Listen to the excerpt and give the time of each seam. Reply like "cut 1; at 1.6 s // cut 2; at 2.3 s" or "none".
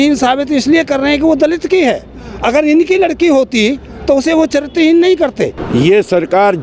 cut 1; at 5.6 s